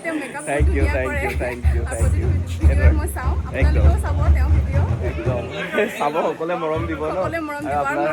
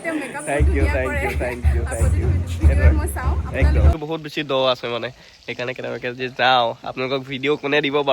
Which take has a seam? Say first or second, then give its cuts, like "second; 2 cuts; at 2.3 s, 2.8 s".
second; 1 cut; at 4.0 s